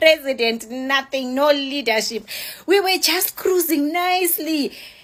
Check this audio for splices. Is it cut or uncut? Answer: uncut